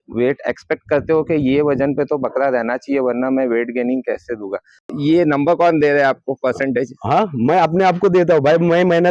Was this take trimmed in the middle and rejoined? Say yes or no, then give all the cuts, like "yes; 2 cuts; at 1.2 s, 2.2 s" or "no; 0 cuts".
yes; 1 cut; at 4.9 s